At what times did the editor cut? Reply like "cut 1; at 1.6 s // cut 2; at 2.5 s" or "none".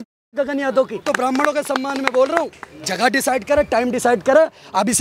cut 1; at 1.0 s